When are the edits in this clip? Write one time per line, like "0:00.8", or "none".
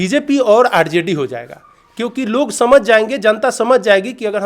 none